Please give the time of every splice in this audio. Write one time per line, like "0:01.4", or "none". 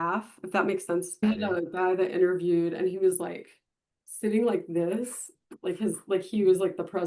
0:01.2